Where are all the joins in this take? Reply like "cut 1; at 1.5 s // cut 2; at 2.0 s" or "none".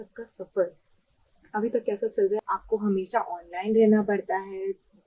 cut 1; at 2.4 s

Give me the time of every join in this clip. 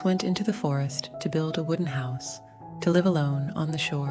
none

